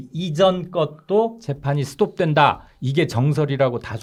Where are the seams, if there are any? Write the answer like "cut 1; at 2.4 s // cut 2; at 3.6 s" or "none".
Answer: none